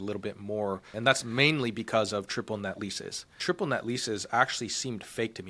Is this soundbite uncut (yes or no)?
no